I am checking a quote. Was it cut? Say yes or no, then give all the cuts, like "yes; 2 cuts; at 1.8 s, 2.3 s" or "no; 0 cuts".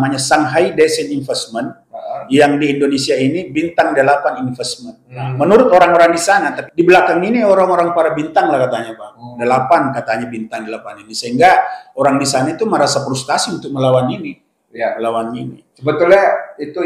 no; 0 cuts